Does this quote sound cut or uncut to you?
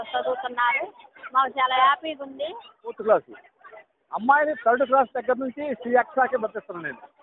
cut